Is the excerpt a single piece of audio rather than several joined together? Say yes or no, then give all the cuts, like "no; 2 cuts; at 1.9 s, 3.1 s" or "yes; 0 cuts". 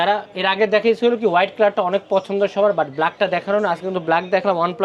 yes; 0 cuts